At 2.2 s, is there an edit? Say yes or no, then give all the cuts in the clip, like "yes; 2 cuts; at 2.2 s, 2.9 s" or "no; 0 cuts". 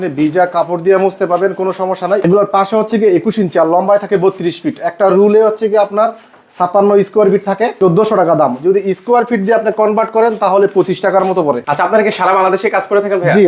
yes; 3 cuts; at 2.2 s, 7.7 s, 11.7 s